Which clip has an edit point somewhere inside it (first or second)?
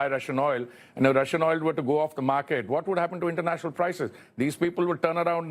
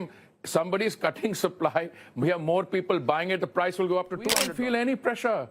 second